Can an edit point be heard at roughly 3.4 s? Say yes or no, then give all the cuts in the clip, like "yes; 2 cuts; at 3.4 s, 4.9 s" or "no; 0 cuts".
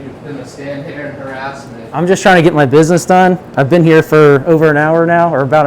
no; 0 cuts